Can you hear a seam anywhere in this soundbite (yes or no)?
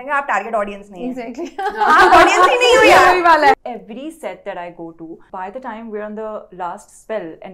yes